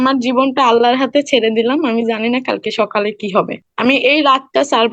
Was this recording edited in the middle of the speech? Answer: yes; 1 cut; at 3.6 s

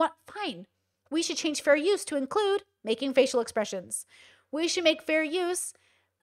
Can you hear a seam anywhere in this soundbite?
no; 0 cuts

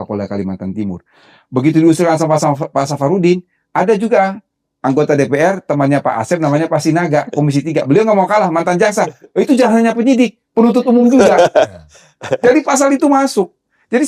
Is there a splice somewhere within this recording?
no; 0 cuts

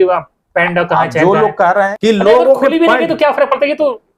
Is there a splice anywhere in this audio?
yes; 1 cut; at 1.9 s

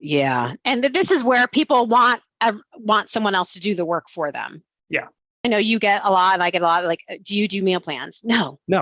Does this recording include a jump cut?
yes; 1 cut; at 5.4 s

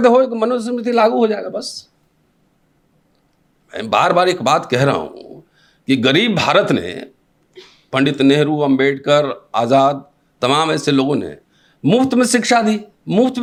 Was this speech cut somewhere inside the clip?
no; 0 cuts

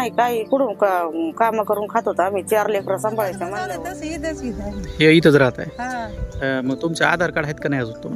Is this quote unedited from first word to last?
no; 1 cut; at 3.6 s

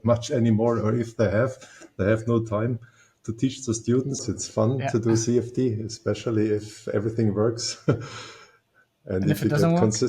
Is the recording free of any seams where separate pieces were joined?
no; 1 cut; at 4.2 s

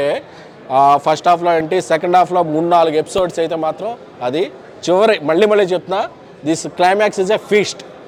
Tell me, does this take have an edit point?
no; 0 cuts

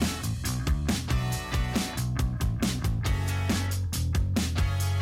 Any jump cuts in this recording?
yes; 1 cut; at 2.3 s

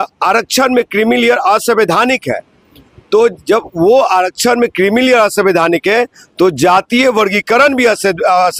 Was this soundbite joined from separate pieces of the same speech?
no; 0 cuts

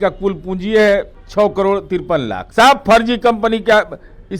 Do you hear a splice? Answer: yes; 2 cuts; at 1.2 s, 2.4 s

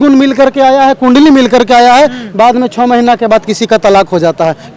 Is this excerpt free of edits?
yes; 0 cuts

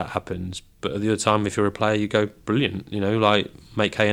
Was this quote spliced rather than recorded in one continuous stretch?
no; 0 cuts

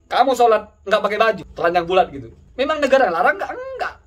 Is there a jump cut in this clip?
yes; 2 cuts; at 1.5 s, 2.7 s

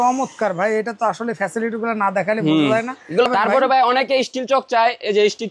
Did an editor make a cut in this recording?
yes; 1 cut; at 3.2 s

